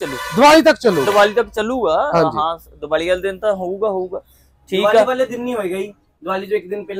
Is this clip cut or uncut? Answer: uncut